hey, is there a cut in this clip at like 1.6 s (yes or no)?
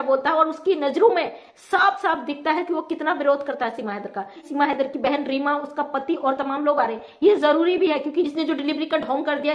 no